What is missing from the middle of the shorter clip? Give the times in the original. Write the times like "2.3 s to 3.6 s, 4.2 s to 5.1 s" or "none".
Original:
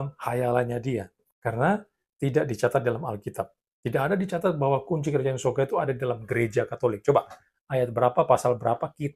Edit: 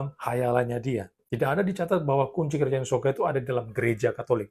1.2 s to 3.7 s